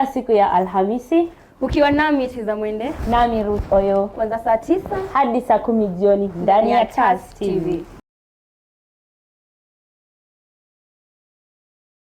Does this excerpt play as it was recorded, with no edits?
yes; 0 cuts

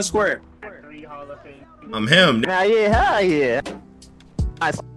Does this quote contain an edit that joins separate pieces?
no; 0 cuts

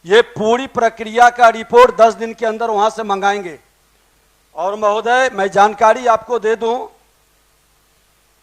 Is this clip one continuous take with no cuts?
yes; 0 cuts

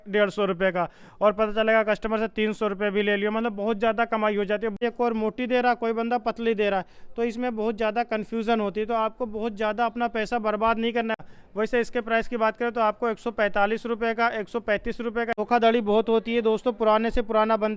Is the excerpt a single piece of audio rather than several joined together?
no; 3 cuts; at 4.7 s, 11.2 s, 15.3 s

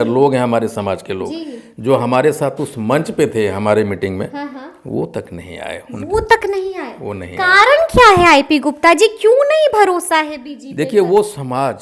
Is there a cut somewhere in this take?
no; 0 cuts

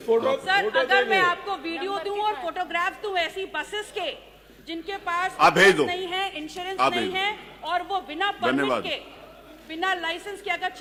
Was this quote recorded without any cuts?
yes; 0 cuts

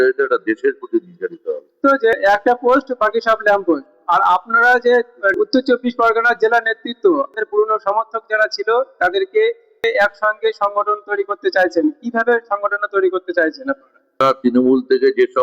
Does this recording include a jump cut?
yes; 3 cuts; at 1.8 s, 7.3 s, 14.2 s

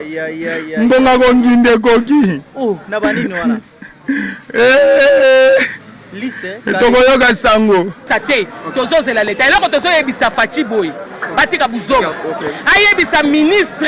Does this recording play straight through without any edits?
no; 1 cut; at 8.1 s

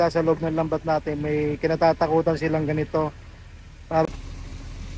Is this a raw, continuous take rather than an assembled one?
no; 1 cut; at 4.0 s

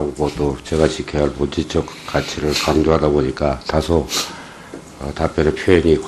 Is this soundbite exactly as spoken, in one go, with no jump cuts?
yes; 0 cuts

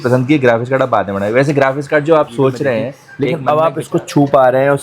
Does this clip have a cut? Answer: yes; 1 cut; at 3.1 s

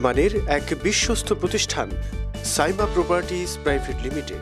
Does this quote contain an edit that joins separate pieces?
no; 0 cuts

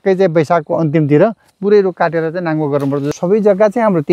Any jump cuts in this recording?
yes; 1 cut; at 3.1 s

